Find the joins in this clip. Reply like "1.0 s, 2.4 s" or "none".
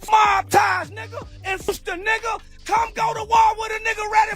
1.7 s